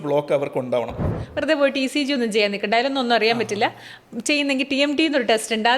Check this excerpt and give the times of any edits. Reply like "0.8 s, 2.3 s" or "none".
1.2 s